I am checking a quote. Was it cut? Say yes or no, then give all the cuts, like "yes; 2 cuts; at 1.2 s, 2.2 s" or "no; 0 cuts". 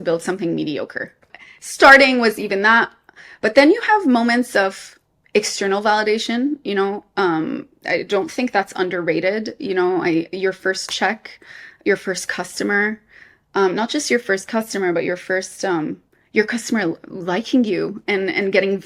yes; 1 cut; at 1.2 s